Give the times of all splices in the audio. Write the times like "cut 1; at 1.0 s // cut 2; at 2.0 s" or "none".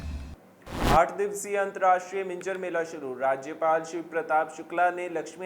cut 1; at 0.9 s